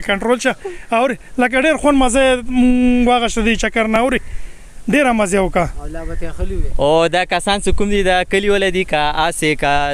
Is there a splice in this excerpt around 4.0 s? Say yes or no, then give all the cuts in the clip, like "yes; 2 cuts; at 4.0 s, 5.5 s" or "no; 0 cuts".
no; 0 cuts